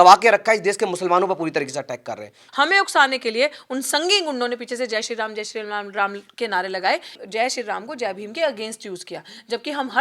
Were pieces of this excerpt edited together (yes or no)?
yes